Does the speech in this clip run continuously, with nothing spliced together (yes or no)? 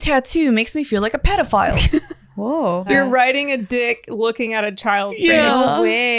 no